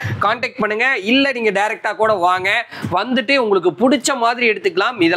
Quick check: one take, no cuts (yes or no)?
yes